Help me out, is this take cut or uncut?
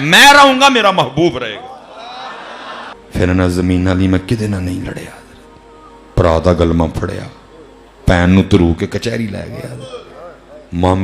cut